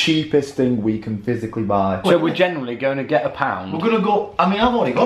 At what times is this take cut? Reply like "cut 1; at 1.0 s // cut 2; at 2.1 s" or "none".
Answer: cut 1; at 2.0 s